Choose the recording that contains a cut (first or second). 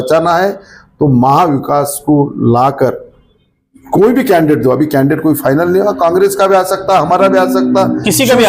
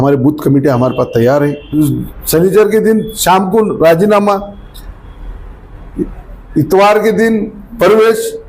second